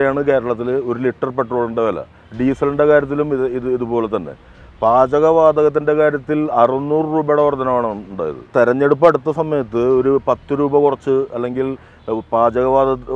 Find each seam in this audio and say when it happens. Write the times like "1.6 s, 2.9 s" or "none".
8.5 s